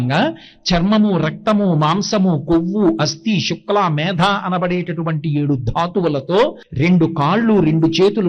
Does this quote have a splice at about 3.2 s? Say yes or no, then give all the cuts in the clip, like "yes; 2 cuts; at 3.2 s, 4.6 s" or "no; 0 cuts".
no; 1 cut; at 6.6 s